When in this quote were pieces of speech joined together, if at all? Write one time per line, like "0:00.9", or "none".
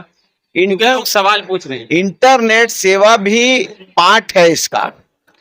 none